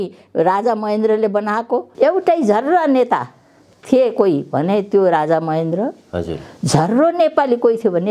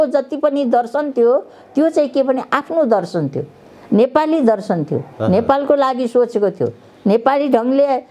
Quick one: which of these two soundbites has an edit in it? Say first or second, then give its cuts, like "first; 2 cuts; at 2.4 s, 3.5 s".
first; 1 cut; at 1.9 s